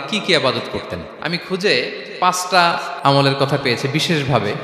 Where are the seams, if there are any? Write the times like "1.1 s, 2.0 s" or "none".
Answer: 2.9 s